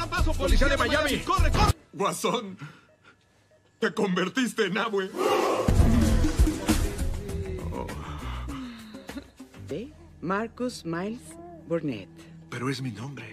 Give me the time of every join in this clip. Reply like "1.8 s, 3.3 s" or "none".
5.6 s